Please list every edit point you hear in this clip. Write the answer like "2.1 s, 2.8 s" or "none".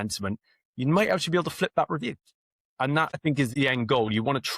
3.2 s